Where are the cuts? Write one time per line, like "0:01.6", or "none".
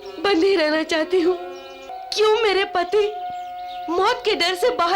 0:02.0